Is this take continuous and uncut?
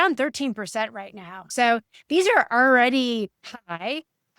no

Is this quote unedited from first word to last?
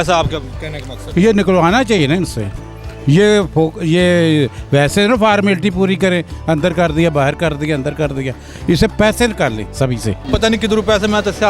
no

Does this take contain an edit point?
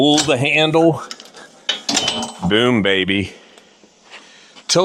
no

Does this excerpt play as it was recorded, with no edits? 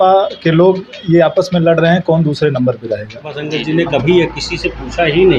no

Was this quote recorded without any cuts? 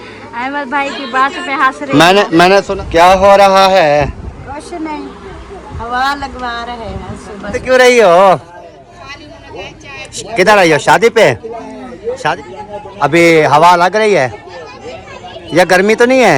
no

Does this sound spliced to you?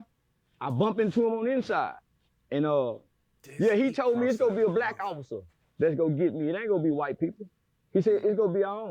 no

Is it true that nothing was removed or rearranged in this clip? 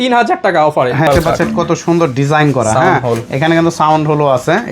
no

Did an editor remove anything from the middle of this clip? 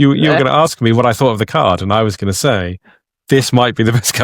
no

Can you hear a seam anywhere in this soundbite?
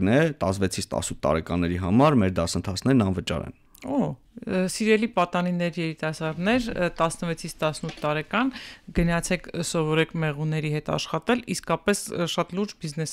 no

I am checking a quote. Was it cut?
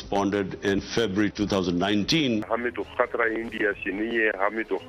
yes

